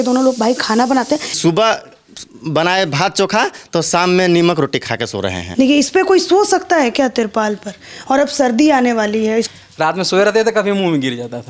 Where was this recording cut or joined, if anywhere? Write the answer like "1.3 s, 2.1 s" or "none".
1.4 s, 5.4 s, 9.5 s